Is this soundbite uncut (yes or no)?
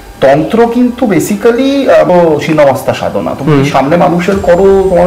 no